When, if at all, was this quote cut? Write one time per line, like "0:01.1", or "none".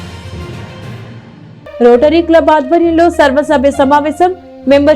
none